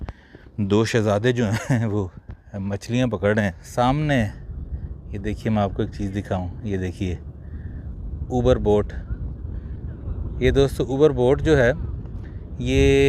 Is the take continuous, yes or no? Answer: no